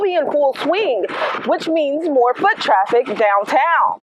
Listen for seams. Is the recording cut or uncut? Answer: uncut